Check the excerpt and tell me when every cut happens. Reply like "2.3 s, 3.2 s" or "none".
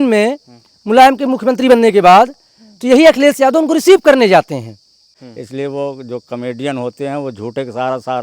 5.2 s

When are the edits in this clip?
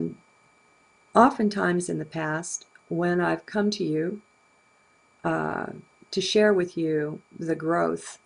2.6 s

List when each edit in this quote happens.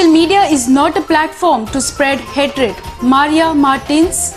none

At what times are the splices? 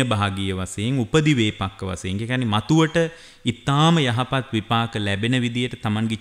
none

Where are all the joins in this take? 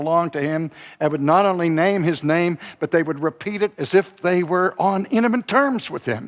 none

